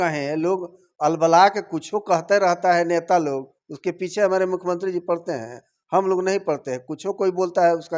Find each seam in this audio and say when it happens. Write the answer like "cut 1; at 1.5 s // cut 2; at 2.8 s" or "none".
none